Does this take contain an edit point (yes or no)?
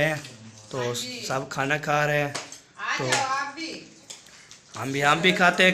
no